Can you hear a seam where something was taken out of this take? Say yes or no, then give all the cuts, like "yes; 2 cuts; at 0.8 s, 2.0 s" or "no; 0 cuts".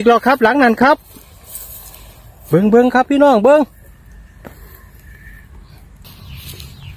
yes; 1 cut; at 6.1 s